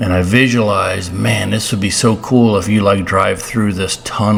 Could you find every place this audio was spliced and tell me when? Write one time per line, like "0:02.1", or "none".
none